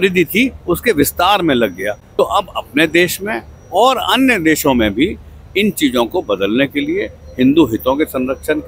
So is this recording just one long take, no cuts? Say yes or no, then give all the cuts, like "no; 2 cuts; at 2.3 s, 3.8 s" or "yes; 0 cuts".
no; 1 cut; at 2.0 s